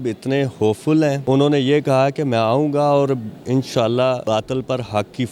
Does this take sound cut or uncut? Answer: cut